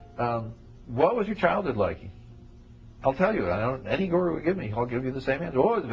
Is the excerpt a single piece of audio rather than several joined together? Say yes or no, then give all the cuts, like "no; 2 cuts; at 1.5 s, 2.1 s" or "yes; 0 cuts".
yes; 0 cuts